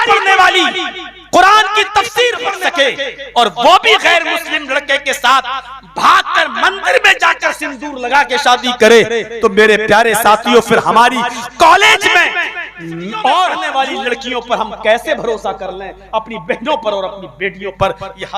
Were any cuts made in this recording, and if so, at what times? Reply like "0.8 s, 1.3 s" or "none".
2.5 s, 13.6 s